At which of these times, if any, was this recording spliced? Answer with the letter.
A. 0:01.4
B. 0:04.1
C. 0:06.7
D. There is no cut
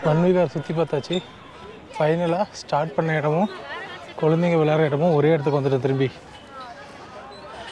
D